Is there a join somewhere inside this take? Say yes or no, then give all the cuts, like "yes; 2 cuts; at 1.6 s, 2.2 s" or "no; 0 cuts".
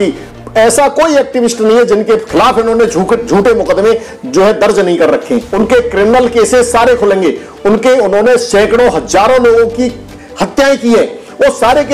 yes; 1 cut; at 5.5 s